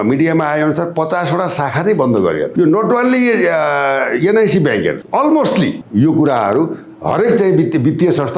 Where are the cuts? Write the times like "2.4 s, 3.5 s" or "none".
2.5 s, 5.0 s, 5.8 s